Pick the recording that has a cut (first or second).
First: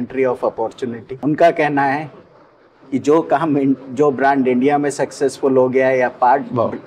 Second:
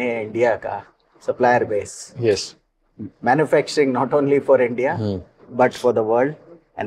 first